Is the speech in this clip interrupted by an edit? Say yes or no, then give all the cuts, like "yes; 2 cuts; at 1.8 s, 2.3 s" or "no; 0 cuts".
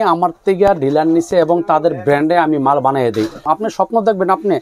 yes; 1 cut; at 3.4 s